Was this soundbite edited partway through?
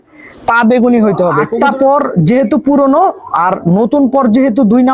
yes; 1 cut; at 1.5 s

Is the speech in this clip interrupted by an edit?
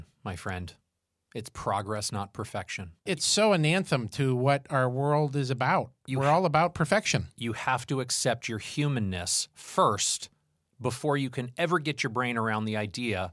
yes; 1 cut; at 3.1 s

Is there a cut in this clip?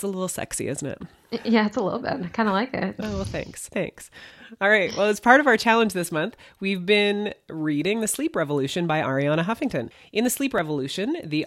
yes; 1 cut; at 10.0 s

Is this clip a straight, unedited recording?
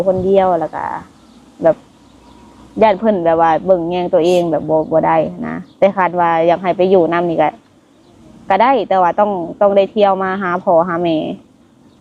yes; 0 cuts

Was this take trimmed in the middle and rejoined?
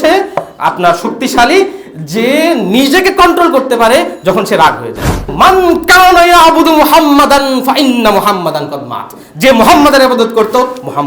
yes; 1 cut; at 5.3 s

